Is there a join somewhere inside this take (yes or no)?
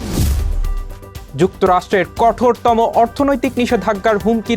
yes